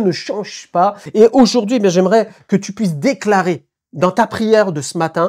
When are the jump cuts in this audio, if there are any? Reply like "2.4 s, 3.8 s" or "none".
1.0 s